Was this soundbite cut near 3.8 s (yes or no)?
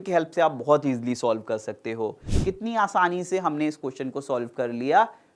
no